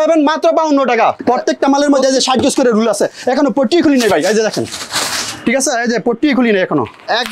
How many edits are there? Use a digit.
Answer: 1